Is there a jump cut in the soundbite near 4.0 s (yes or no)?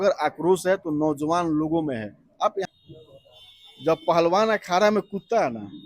no